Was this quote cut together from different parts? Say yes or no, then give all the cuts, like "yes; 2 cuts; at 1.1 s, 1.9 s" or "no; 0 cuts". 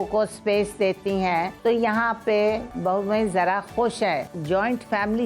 yes; 3 cuts; at 1.5 s, 2.7 s, 4.3 s